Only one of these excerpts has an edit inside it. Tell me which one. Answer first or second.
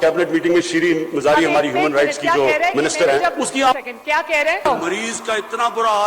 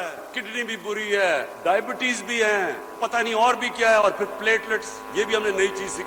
first